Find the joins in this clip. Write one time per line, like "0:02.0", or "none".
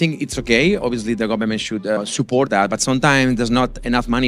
0:02.0